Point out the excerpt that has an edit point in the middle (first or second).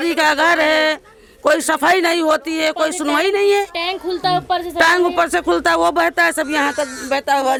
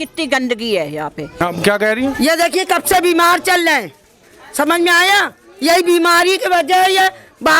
second